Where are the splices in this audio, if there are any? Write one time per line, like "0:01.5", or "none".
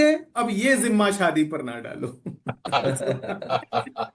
none

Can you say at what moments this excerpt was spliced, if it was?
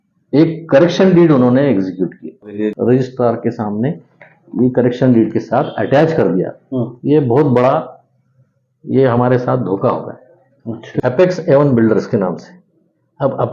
0:02.6
0:11.0

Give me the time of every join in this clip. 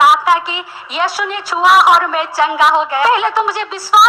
0:03.1

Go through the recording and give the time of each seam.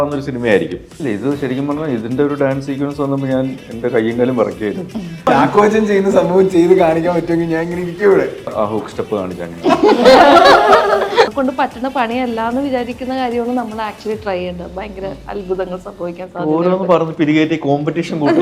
0:00.9
0:05.3
0:08.5
0:11.3

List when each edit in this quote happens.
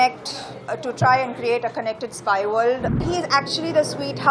0:03.0

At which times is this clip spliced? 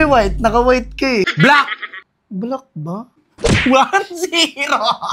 0:01.3
0:03.3

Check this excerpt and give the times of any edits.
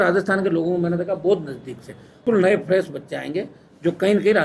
0:02.2

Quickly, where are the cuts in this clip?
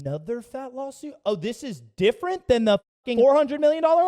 0:03.0

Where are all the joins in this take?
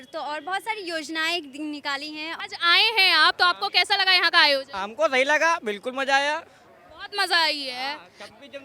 0:02.4

